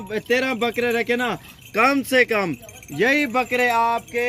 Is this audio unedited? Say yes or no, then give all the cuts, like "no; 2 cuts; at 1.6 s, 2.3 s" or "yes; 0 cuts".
yes; 0 cuts